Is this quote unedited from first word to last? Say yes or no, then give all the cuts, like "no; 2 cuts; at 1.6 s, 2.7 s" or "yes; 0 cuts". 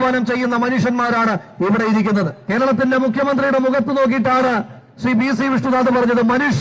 no; 1 cut; at 2.4 s